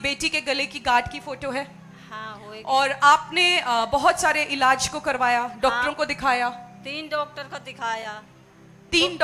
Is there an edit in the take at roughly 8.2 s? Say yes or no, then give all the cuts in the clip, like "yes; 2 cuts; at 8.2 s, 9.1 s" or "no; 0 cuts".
no; 0 cuts